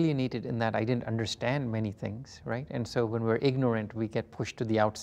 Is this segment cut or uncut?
uncut